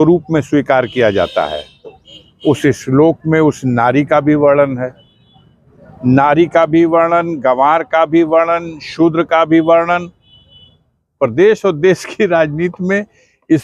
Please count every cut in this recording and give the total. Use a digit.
1